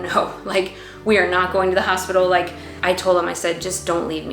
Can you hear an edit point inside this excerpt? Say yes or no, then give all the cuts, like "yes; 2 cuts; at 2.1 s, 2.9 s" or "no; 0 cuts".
yes; 1 cut; at 2.6 s